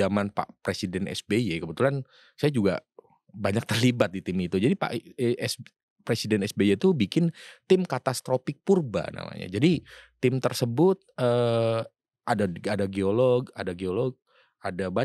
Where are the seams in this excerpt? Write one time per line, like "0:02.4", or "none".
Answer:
none